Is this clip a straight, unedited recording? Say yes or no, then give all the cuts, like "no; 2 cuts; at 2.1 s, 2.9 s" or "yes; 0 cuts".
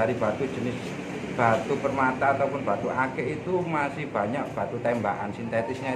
yes; 0 cuts